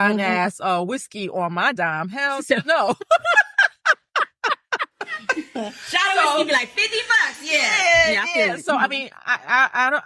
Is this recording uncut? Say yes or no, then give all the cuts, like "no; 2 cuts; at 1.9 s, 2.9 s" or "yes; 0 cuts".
yes; 0 cuts